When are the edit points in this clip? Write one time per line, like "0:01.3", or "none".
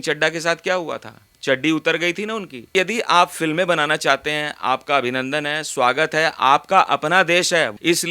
0:02.6